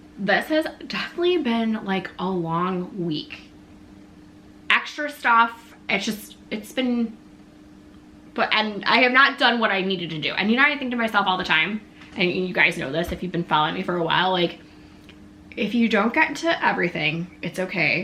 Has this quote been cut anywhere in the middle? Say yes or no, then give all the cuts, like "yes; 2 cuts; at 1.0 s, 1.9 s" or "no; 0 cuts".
no; 0 cuts